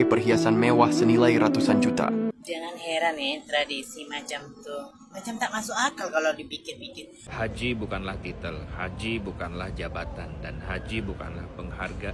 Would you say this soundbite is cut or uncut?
cut